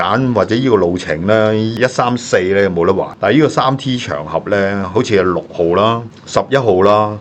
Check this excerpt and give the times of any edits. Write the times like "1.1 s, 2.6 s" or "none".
none